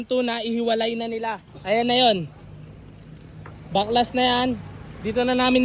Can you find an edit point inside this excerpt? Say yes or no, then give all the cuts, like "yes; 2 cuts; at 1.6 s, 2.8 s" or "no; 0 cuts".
no; 0 cuts